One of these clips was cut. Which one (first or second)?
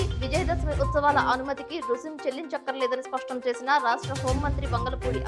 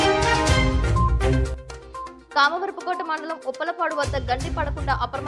second